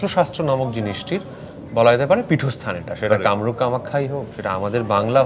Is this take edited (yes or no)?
no